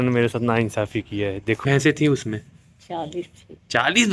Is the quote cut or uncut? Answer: cut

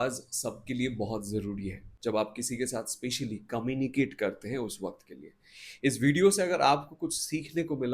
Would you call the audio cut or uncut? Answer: cut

